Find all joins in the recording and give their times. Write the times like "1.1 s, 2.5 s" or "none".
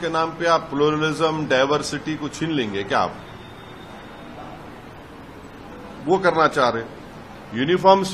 none